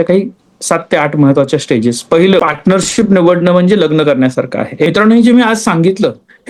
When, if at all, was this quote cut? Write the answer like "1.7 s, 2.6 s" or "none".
2.4 s, 4.9 s